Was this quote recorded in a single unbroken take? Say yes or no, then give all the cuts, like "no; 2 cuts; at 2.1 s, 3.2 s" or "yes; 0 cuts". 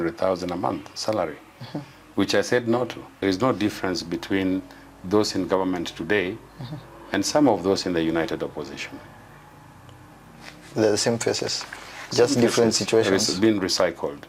no; 1 cut; at 3.2 s